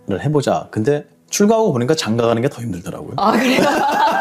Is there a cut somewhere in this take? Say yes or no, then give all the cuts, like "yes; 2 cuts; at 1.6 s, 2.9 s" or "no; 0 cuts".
no; 0 cuts